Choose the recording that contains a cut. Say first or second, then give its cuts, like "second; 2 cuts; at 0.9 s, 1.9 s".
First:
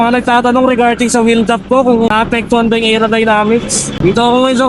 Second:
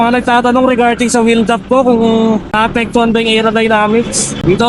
first; 1 cut; at 2.1 s